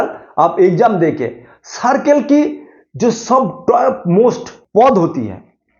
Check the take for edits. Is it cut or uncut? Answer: cut